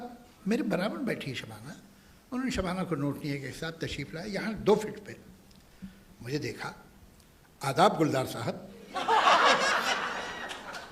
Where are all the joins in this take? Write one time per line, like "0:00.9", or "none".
none